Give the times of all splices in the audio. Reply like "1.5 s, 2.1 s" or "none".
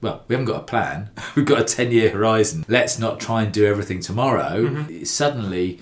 2.6 s, 4.9 s